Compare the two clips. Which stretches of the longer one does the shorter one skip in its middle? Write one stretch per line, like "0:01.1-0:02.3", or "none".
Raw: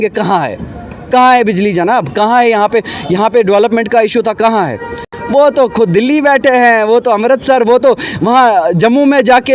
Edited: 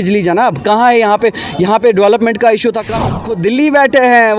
0:04.8-0:05.8